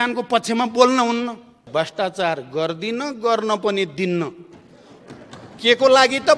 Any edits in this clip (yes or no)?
yes